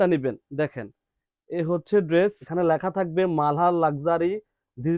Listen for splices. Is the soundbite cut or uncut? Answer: cut